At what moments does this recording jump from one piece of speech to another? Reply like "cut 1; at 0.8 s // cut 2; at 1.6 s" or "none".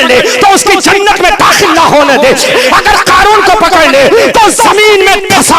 cut 1; at 2.5 s